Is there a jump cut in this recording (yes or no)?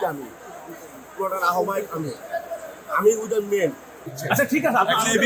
yes